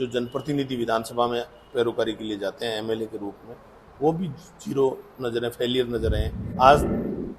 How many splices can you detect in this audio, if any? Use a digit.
1